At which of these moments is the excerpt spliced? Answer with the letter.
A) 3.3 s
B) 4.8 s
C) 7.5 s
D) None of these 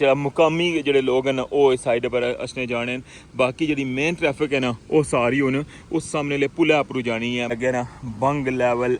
C